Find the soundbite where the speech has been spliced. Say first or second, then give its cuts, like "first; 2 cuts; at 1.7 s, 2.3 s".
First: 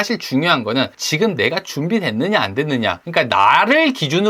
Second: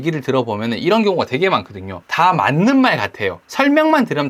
first; 2 cuts; at 1.0 s, 3.0 s